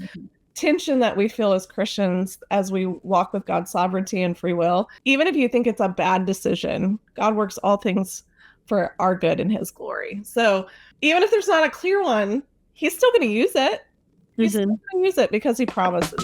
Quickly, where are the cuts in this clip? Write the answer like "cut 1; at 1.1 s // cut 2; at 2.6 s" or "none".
cut 1; at 4.9 s // cut 2; at 10.8 s